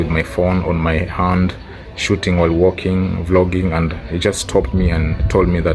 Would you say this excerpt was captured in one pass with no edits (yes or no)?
yes